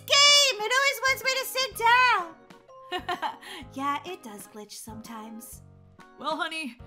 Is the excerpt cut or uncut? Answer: uncut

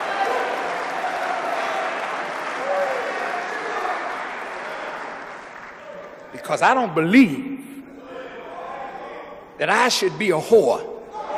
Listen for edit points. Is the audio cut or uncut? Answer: cut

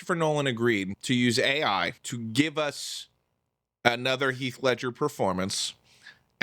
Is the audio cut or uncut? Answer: cut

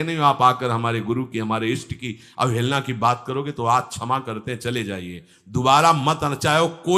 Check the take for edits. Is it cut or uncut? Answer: uncut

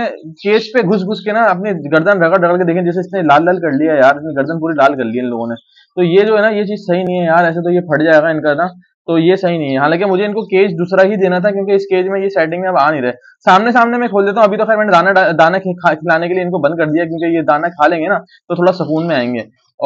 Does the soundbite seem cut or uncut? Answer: uncut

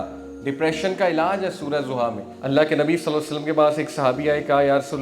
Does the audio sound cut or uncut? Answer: cut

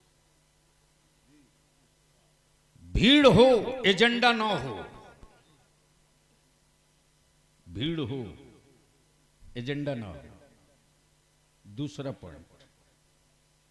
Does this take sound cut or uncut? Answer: uncut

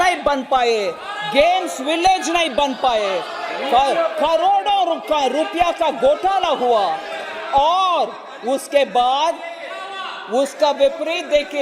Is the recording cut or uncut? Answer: uncut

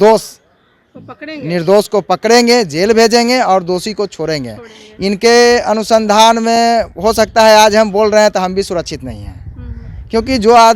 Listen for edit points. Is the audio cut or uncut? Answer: uncut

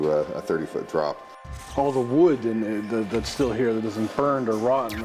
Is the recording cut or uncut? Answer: cut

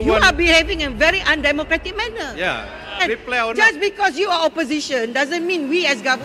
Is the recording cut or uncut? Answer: cut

